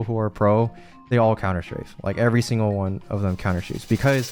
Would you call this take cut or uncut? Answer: uncut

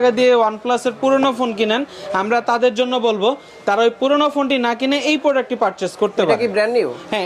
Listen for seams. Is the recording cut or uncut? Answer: uncut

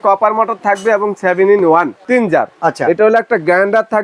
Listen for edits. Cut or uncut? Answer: cut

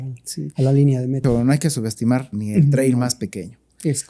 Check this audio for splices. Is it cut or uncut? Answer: cut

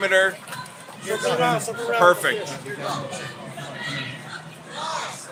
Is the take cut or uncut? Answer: uncut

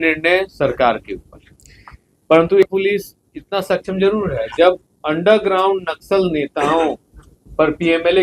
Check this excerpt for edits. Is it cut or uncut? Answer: cut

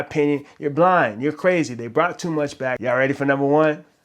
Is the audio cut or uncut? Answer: cut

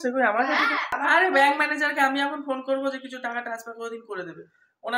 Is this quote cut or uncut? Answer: cut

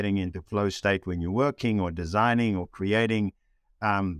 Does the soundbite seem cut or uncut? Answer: uncut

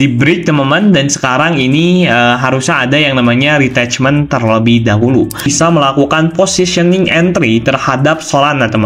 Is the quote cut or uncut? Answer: cut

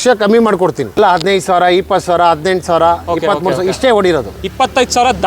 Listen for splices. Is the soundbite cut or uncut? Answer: cut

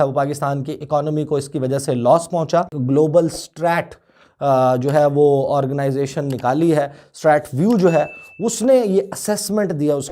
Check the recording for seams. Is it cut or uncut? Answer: cut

